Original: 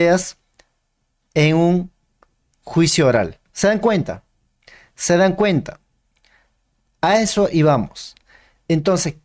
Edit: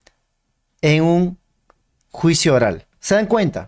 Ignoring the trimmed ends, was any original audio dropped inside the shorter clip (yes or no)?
no